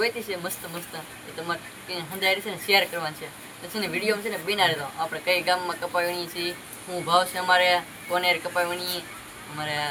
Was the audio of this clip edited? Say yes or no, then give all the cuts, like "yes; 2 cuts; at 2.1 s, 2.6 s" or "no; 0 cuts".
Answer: no; 0 cuts